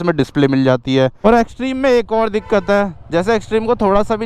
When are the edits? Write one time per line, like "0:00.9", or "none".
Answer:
0:01.2